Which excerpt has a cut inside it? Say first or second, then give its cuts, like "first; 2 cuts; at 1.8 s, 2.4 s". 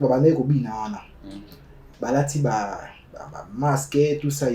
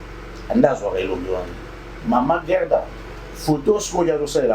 second; 1 cut; at 1.9 s